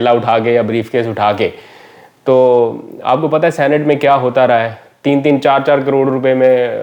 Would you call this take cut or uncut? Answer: uncut